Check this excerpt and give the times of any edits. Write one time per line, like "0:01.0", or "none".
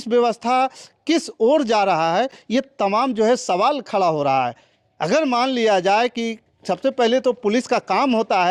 none